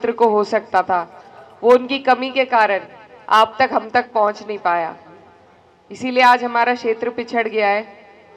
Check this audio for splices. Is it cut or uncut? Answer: uncut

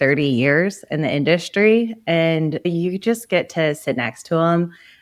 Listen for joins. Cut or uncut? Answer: cut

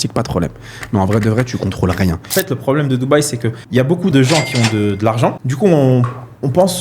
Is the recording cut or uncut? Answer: cut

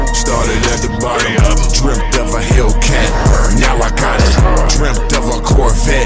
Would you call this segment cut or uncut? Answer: uncut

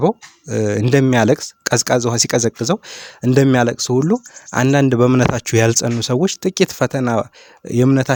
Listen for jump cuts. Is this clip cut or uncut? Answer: uncut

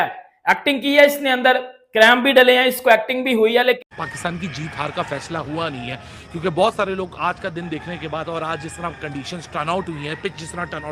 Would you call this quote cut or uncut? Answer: cut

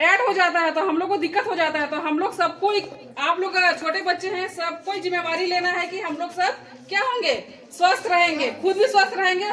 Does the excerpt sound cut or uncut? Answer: uncut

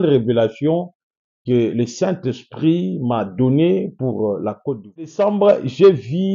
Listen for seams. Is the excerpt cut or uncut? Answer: cut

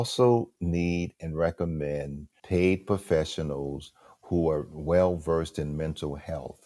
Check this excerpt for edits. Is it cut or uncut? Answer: cut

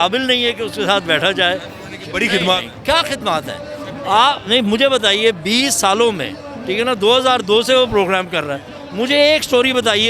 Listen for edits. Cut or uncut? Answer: uncut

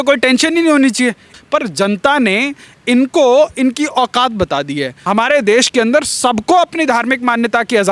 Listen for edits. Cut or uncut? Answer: cut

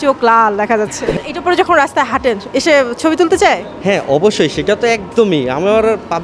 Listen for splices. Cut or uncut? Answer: cut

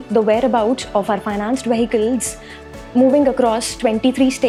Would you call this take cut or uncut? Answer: uncut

